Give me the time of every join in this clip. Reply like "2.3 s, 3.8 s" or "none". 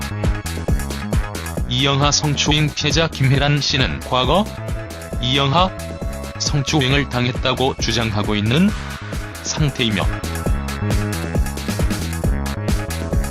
7.4 s